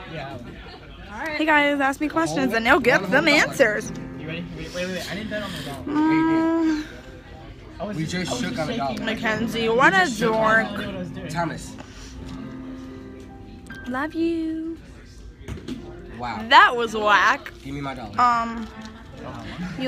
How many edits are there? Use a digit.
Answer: 1